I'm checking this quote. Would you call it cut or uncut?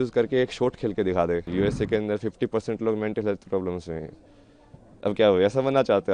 cut